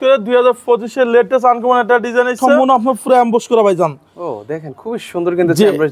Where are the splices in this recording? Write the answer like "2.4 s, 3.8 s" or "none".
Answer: 2.4 s